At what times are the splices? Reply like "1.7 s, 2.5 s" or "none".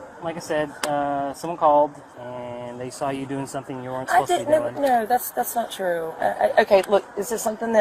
2.1 s